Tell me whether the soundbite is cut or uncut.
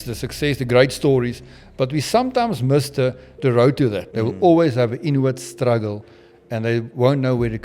cut